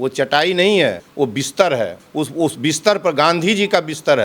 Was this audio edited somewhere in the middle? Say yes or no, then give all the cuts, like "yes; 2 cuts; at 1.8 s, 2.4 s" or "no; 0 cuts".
yes; 2 cuts; at 1.0 s, 2.0 s